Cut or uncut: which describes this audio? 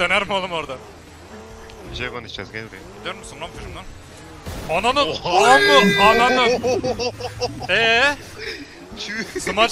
uncut